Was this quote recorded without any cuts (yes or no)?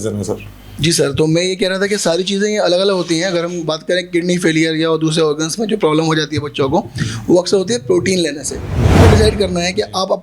no